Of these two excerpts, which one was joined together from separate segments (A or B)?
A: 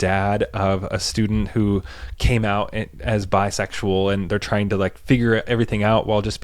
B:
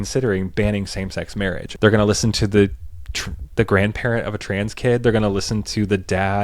B